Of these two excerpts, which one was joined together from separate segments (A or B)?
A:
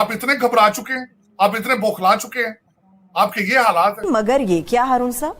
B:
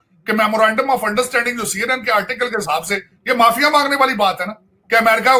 A